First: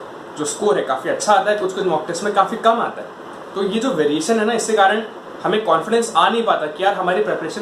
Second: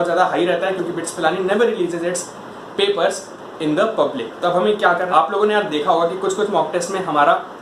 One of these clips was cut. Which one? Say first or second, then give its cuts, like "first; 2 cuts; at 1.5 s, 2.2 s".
second; 1 cut; at 5.1 s